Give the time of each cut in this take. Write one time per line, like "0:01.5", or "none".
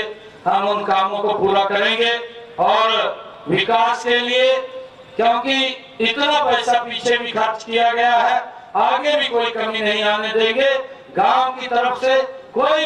none